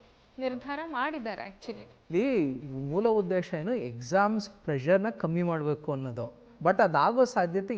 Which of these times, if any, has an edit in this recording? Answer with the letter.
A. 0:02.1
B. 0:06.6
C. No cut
A